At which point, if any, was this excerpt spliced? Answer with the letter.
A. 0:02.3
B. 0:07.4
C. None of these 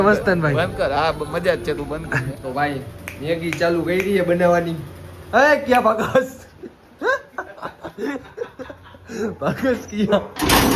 A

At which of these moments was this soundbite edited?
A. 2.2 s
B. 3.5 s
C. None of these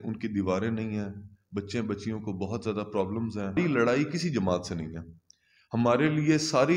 B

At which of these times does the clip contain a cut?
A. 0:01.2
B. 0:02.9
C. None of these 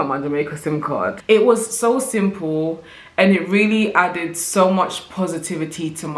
A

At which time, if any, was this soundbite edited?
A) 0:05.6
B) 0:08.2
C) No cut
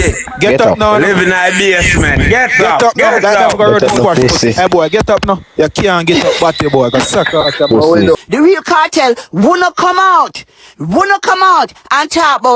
B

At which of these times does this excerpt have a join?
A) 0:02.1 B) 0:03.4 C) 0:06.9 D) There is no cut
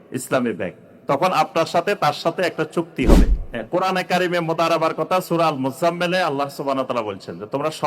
B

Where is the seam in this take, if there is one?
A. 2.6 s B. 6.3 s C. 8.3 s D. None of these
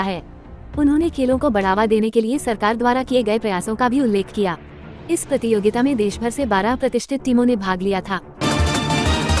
C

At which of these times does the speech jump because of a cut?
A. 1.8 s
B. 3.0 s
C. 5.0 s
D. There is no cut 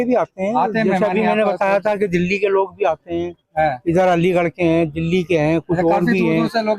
D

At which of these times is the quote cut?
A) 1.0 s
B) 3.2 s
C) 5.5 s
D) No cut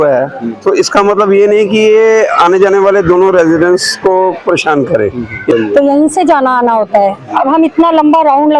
C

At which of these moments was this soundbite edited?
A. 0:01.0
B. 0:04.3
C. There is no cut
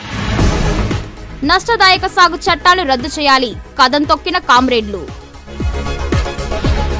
C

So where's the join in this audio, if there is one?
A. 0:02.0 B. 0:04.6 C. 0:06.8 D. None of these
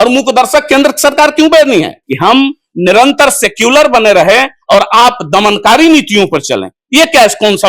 A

